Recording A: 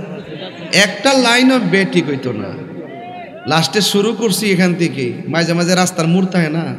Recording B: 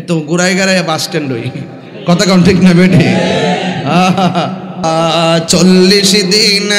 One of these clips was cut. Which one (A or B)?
B